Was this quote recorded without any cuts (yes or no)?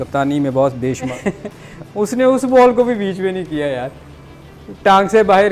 no